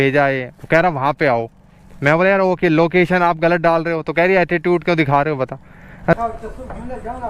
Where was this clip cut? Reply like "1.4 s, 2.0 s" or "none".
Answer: 6.1 s